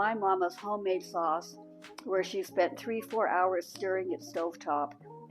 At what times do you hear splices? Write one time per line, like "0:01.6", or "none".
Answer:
none